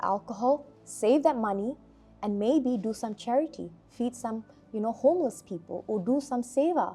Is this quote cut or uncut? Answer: uncut